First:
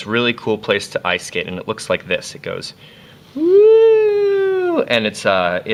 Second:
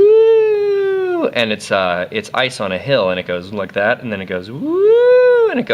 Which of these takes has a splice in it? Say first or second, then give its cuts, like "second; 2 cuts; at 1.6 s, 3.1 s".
second; 1 cut; at 3.3 s